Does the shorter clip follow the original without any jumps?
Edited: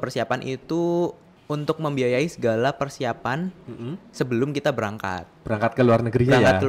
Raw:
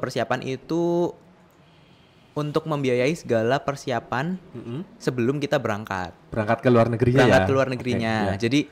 no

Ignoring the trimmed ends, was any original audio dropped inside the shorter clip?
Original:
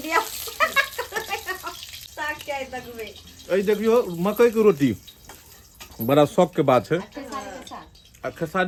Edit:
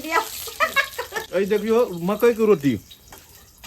yes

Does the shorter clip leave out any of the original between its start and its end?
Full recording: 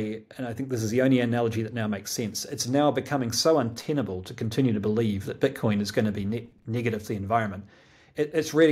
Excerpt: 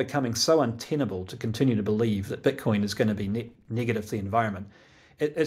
no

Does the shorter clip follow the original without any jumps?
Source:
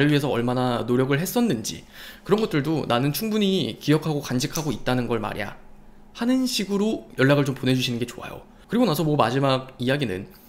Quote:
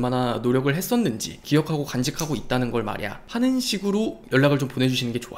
no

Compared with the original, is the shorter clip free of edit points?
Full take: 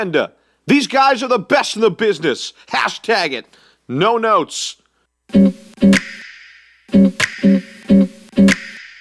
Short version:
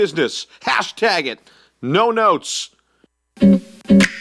no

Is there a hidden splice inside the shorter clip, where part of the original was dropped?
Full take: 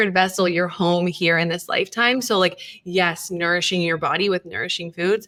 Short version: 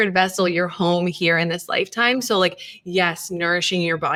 no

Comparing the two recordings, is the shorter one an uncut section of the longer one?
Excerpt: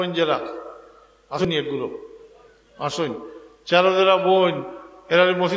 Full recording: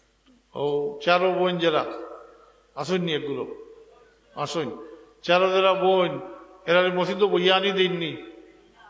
no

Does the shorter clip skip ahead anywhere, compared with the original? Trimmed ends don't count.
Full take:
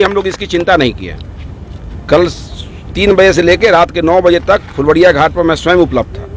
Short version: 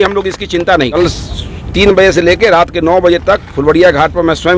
yes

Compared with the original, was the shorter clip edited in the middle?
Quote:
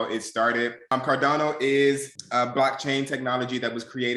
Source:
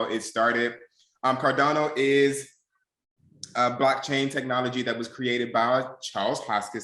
yes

